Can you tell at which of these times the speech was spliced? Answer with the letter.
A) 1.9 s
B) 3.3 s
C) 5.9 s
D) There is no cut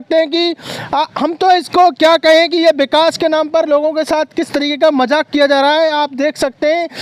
D